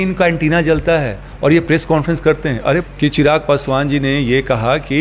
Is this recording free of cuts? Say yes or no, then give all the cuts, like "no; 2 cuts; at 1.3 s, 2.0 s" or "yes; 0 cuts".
no; 1 cut; at 2.8 s